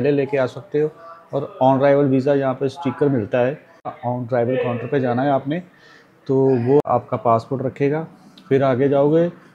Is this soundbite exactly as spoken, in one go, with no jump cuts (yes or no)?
no